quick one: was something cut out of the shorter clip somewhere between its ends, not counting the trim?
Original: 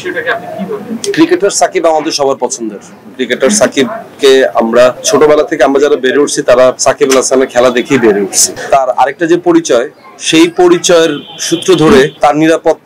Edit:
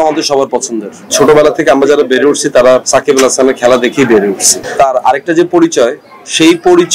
yes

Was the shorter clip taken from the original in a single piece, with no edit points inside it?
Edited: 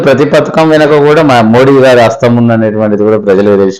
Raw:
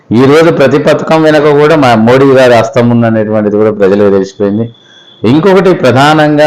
yes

